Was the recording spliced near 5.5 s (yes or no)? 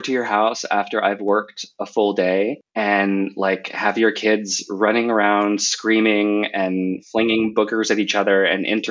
no